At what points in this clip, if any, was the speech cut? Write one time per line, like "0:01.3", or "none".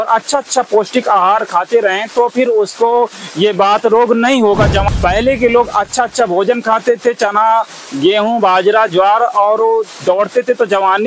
0:04.8